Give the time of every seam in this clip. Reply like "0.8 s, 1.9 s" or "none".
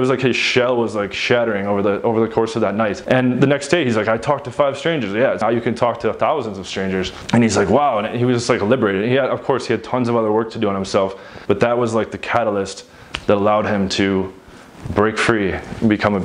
5.4 s, 11.3 s